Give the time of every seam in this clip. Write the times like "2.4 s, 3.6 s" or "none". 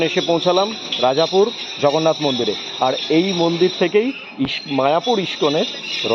none